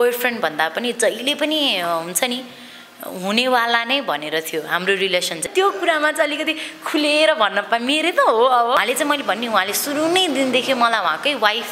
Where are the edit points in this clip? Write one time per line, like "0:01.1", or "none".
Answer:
0:05.5
0:08.8